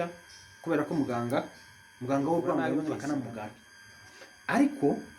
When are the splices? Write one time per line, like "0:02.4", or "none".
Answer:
0:02.8